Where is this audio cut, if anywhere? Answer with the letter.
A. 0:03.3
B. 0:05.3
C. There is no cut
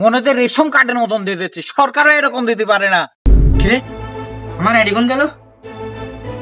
A